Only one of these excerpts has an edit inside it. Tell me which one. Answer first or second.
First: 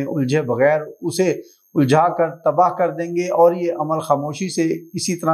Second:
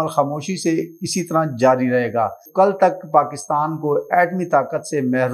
second